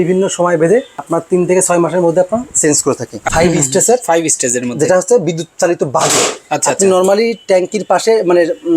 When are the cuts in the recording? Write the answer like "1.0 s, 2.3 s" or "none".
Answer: 1.0 s, 3.2 s